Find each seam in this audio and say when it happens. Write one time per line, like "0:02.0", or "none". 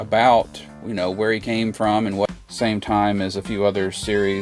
0:02.3